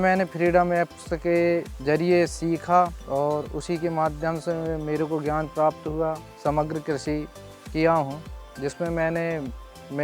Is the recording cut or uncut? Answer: cut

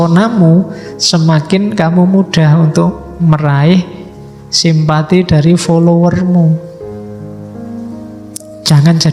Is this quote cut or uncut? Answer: uncut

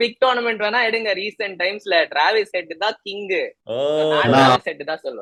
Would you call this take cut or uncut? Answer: uncut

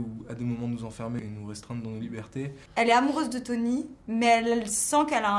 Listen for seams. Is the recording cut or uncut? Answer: cut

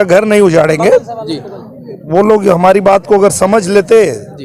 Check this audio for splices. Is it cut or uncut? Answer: uncut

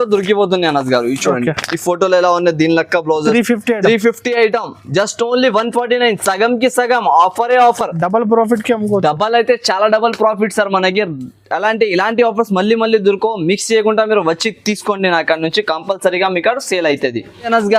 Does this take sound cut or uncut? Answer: uncut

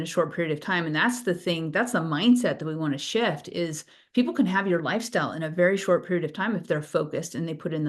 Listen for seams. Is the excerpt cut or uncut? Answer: uncut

